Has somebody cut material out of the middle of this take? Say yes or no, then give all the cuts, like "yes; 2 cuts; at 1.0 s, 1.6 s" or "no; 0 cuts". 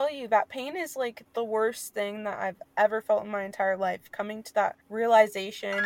yes; 3 cuts; at 1.2 s, 2.6 s, 4.8 s